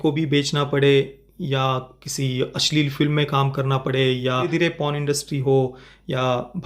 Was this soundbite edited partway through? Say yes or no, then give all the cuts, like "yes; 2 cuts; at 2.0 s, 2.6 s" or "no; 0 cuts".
yes; 1 cut; at 4.5 s